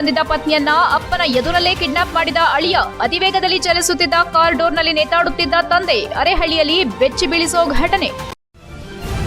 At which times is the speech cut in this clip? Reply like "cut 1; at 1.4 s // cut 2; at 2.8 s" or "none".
cut 1; at 8.2 s